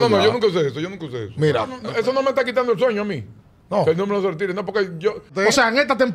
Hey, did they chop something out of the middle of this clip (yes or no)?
yes